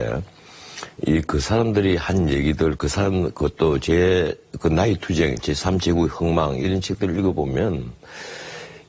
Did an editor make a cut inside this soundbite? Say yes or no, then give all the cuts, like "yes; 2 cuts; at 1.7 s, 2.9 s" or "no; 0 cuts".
no; 0 cuts